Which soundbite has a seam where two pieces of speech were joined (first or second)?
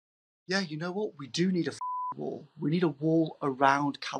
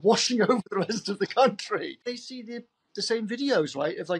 second